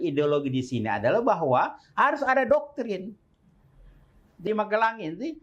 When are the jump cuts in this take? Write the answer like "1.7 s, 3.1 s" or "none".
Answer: 4.4 s